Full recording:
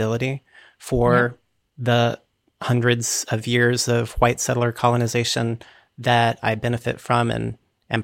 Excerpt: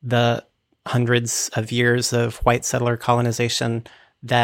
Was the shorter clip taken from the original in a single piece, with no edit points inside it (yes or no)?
yes